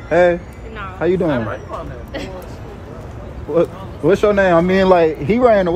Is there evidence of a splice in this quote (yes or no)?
no